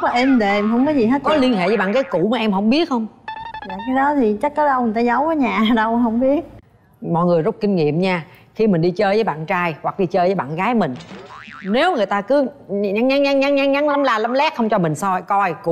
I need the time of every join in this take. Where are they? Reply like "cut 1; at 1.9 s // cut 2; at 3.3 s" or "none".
cut 1; at 6.6 s